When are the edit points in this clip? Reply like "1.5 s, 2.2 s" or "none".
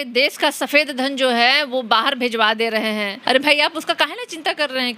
3.1 s